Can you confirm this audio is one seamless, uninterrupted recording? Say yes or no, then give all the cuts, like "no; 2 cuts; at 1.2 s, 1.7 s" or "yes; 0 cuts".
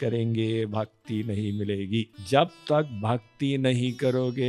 no; 1 cut; at 2.2 s